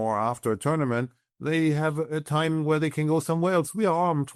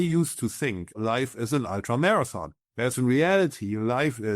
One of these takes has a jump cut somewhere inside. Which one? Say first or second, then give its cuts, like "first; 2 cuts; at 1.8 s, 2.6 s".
second; 1 cut; at 1.0 s